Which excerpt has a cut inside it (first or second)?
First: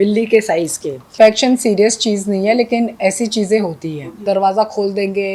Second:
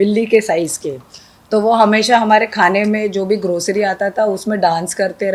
first